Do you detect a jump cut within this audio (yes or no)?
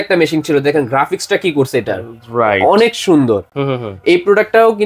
no